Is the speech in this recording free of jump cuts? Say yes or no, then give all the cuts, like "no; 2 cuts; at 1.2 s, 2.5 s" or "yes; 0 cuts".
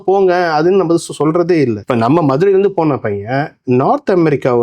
no; 2 cuts; at 1.8 s, 3.6 s